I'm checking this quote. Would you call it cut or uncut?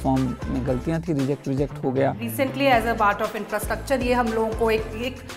cut